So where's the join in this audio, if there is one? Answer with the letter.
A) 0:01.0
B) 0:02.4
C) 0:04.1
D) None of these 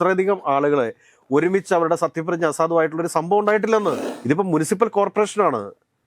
C